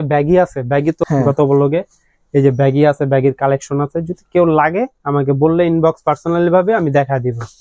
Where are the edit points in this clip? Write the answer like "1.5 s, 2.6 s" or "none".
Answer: 1.0 s